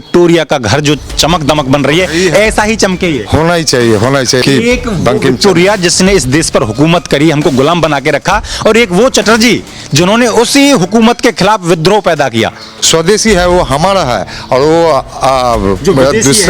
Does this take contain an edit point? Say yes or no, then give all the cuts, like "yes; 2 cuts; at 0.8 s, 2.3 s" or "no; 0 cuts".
yes; 2 cuts; at 4.4 s, 12.7 s